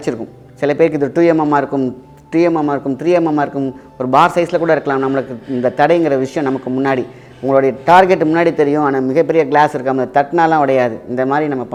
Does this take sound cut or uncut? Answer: uncut